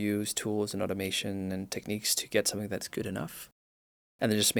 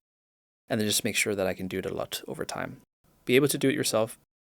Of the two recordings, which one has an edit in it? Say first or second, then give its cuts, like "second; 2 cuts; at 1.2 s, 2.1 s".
second; 1 cut; at 3.1 s